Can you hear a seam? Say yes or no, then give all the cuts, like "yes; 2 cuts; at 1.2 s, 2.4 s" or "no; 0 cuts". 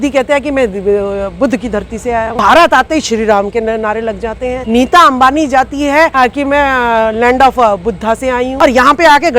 yes; 4 cuts; at 2.3 s, 4.6 s, 6.1 s, 8.5 s